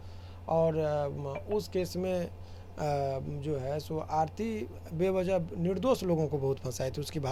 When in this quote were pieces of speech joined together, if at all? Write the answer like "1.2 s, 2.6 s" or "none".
none